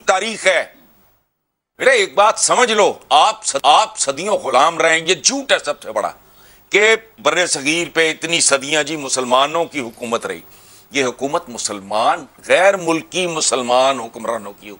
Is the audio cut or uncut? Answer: uncut